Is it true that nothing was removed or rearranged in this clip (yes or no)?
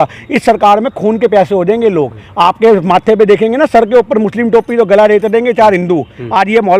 yes